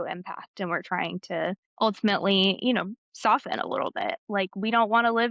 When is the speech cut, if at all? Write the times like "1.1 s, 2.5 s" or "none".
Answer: none